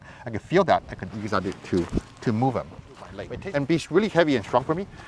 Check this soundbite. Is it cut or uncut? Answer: cut